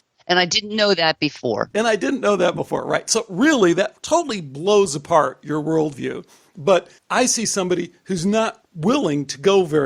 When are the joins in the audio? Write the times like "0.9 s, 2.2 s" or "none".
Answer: 7.0 s, 8.7 s